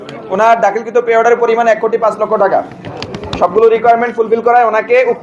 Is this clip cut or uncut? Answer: uncut